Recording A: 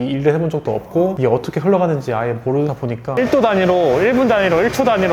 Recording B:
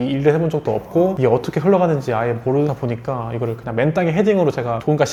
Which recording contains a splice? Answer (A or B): A